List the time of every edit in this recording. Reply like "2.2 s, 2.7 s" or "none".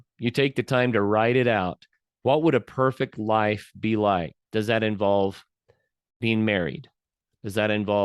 4.4 s

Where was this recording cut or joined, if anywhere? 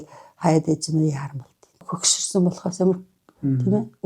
1.7 s

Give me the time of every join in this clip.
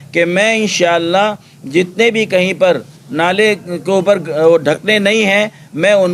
none

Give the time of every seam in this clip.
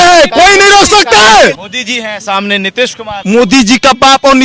1.6 s, 3.1 s

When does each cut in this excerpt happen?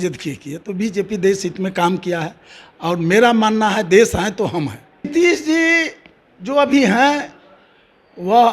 5.1 s

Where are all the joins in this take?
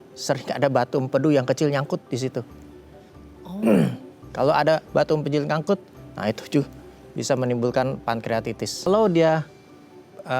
8.9 s

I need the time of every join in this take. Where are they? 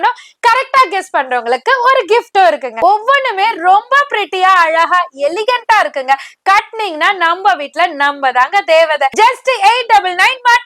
2.7 s, 9.1 s

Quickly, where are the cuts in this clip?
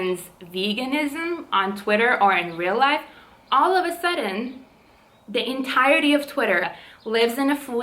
6.7 s

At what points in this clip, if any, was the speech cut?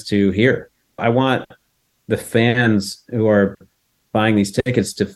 1.0 s

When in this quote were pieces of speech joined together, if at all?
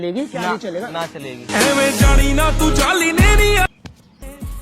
3.7 s

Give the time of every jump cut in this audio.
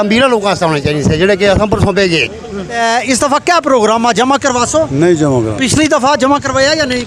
2.8 s

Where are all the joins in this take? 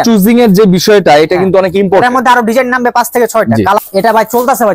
3.8 s

